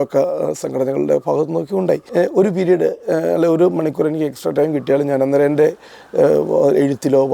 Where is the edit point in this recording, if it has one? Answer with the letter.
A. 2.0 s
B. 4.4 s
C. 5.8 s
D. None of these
A